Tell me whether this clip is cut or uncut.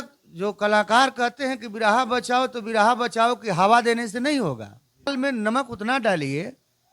cut